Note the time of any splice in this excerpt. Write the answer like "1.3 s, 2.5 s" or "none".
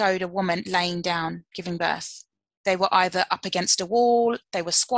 none